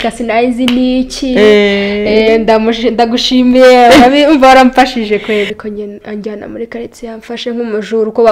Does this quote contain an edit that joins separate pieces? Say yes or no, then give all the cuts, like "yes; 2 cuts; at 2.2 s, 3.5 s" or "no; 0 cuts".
yes; 1 cut; at 5.6 s